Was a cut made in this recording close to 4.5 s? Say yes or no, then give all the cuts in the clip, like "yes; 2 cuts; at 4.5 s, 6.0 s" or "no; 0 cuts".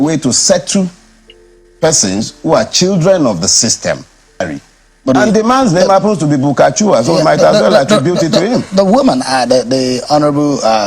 yes; 1 cut; at 4.5 s